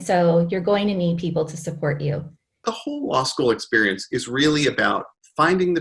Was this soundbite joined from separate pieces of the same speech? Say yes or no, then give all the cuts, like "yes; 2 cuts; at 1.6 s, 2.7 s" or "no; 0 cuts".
yes; 1 cut; at 2.6 s